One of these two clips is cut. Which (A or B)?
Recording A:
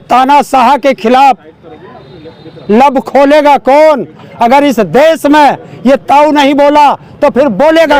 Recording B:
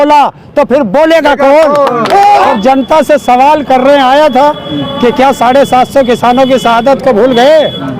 B